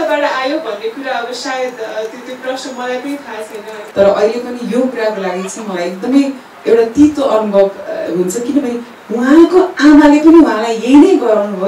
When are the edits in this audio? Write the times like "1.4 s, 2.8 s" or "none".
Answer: 3.8 s

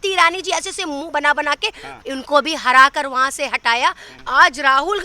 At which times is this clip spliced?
2.0 s, 4.1 s

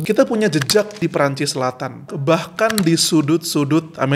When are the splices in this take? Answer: 1.0 s, 2.1 s

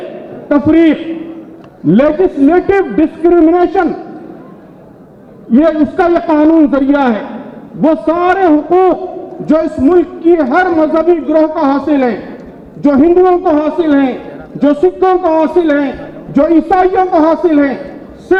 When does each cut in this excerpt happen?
none

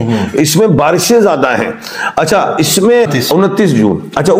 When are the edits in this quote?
3.1 s

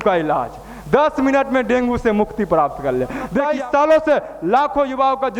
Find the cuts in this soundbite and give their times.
3.5 s

